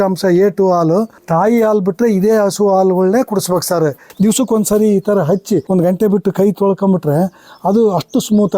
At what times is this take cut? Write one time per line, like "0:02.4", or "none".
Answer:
0:01.2
0:04.0
0:05.7